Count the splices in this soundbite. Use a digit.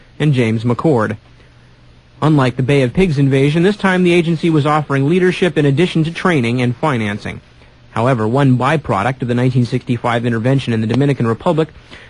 0